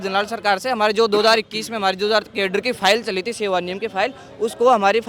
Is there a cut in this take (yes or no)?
no